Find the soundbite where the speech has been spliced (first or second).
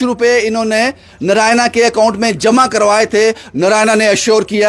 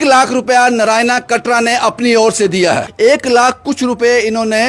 second